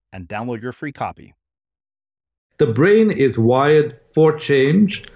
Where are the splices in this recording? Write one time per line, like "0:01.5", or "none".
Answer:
0:02.4